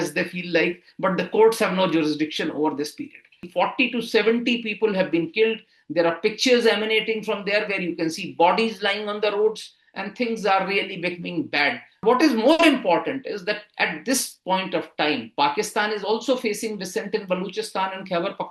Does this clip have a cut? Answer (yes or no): yes